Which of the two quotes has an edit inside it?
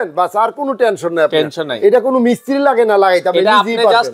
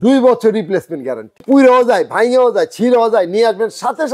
second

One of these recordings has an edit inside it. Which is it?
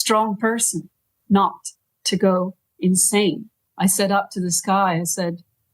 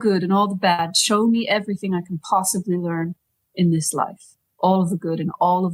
first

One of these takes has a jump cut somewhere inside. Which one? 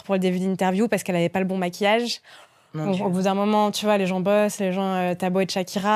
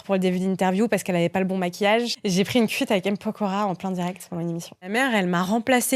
second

